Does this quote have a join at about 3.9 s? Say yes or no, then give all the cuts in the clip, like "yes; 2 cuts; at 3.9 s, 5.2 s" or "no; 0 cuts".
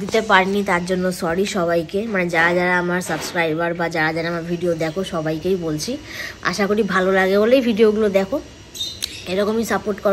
no; 0 cuts